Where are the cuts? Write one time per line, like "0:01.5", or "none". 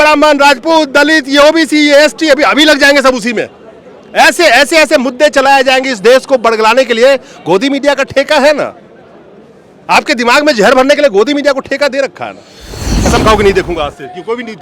0:13.0